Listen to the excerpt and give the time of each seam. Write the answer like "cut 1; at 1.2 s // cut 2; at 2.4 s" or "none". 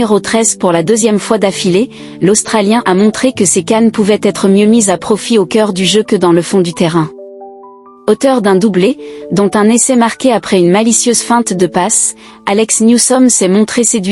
none